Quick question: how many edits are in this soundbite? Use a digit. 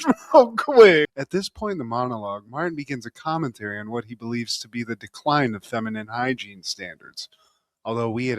1